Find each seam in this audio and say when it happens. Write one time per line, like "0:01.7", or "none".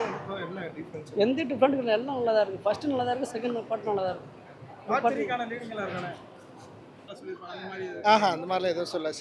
0:07.1